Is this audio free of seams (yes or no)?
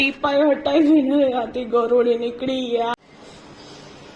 no